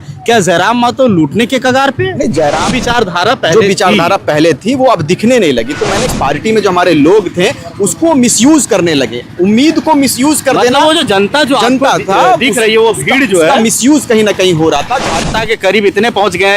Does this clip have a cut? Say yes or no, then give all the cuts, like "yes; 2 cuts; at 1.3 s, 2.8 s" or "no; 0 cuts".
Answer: yes; 3 cuts; at 2.7 s, 6.1 s, 15.3 s